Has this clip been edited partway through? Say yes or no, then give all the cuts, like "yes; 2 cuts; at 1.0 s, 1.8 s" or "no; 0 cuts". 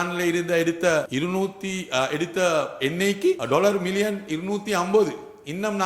yes; 2 cuts; at 1.1 s, 3.4 s